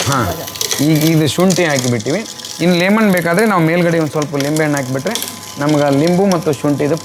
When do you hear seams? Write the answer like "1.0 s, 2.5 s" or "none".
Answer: none